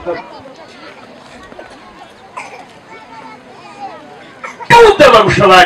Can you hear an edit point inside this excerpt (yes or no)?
yes